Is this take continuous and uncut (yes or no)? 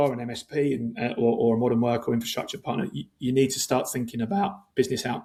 yes